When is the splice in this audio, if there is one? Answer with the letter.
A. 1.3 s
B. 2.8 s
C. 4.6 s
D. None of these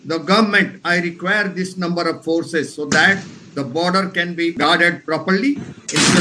C